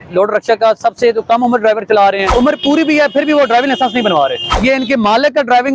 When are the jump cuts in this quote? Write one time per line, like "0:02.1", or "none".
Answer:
0:02.3
0:04.5